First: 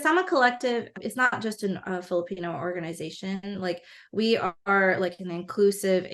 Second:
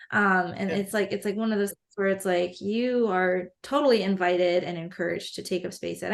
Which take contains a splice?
first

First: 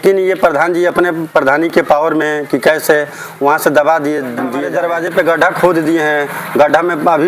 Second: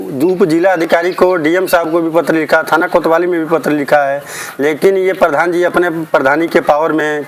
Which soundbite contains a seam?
first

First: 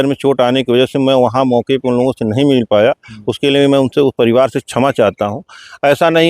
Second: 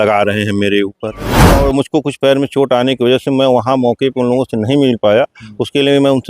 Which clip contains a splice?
second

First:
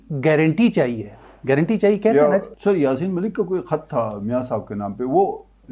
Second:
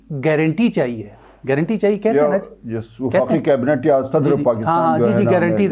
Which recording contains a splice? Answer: first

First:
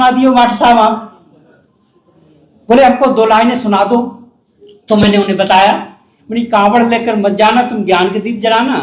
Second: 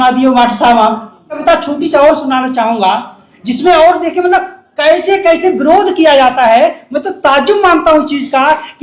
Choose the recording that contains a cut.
second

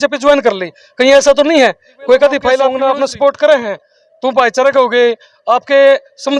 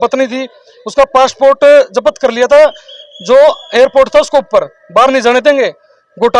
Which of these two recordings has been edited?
first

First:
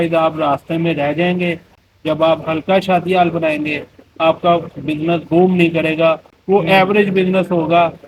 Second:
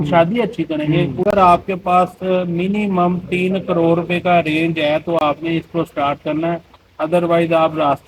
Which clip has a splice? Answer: second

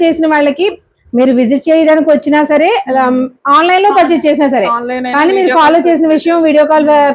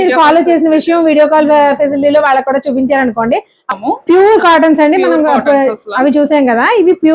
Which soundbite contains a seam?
second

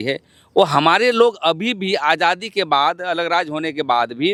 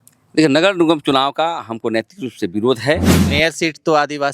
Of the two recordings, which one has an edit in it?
second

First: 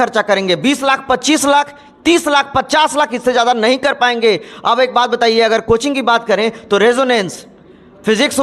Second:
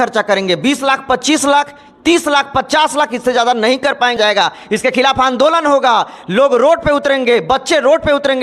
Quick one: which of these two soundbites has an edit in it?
second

